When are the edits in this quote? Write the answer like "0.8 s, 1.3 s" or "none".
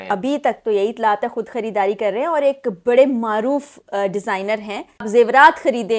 5.1 s